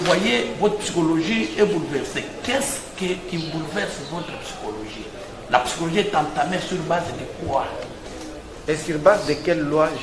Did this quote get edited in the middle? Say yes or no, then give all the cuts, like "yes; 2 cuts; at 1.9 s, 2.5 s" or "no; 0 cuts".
yes; 1 cut; at 8.1 s